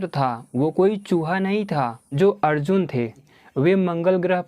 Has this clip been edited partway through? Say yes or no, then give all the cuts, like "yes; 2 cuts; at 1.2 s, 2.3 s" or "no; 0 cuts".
yes; 2 cuts; at 2.0 s, 3.3 s